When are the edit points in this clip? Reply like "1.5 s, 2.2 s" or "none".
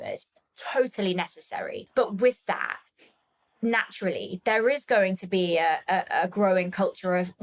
1.8 s